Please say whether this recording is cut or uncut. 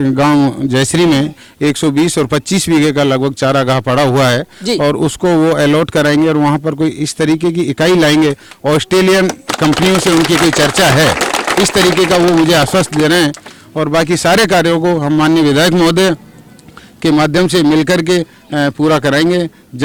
uncut